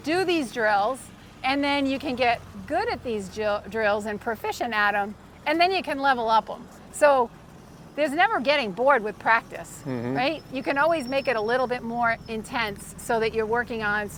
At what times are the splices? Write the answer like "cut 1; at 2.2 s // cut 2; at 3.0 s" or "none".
none